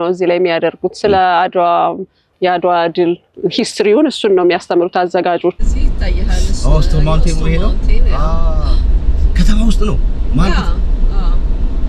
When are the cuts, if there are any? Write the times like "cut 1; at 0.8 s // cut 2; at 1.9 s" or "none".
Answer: cut 1; at 2.3 s // cut 2; at 3.3 s // cut 3; at 5.6 s